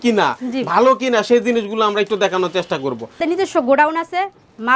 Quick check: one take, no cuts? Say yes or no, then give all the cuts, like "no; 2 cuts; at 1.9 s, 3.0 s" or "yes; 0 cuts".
no; 1 cut; at 3.2 s